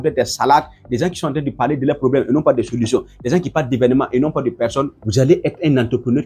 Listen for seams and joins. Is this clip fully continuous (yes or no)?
no